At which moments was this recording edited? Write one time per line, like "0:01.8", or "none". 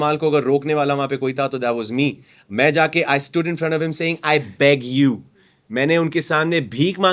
none